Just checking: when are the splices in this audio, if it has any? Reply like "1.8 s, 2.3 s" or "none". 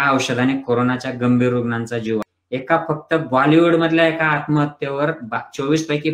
2.4 s